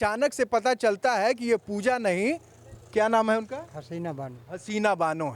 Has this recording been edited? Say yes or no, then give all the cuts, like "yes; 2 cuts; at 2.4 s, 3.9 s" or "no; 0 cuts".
no; 0 cuts